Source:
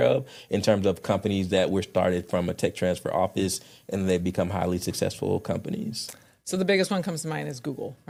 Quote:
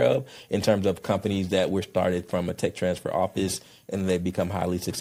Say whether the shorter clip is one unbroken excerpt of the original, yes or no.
yes